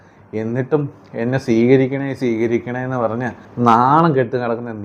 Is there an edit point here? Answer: yes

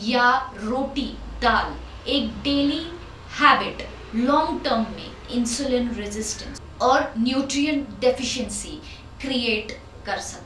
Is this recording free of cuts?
yes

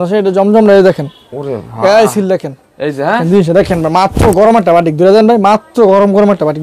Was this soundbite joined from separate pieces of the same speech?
yes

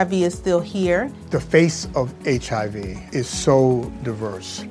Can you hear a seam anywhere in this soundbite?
no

